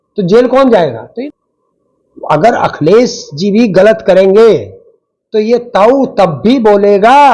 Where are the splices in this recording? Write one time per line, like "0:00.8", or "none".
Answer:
0:01.1